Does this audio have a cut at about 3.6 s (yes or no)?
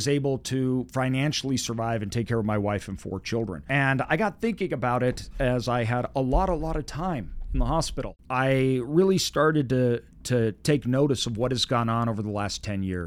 yes